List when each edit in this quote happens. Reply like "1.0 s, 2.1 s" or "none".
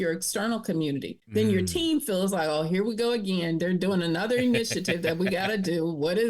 1.2 s